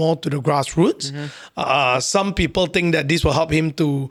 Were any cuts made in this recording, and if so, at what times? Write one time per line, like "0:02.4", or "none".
none